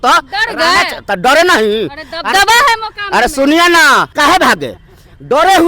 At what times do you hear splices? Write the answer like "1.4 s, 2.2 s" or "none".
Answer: 4.1 s